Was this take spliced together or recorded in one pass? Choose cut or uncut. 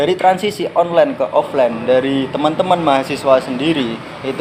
uncut